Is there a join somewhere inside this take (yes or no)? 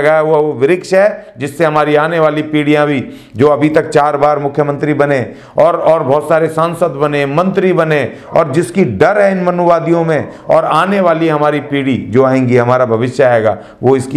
no